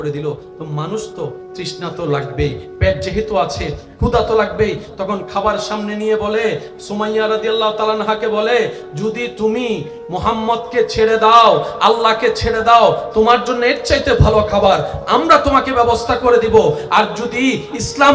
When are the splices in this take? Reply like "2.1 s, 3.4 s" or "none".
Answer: none